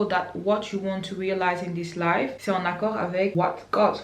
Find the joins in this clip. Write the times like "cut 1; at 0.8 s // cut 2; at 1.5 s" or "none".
cut 1; at 2.4 s // cut 2; at 3.3 s